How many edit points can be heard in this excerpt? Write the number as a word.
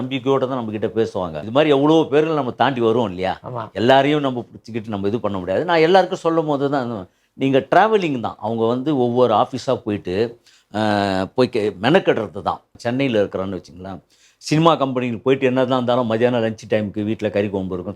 two